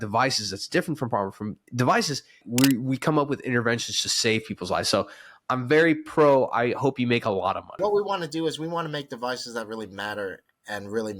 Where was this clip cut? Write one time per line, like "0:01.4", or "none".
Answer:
0:02.4
0:07.7